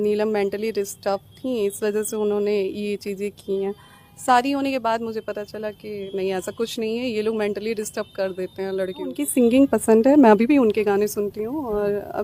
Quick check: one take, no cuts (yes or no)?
no